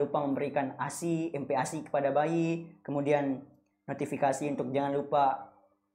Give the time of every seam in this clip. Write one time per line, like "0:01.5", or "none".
none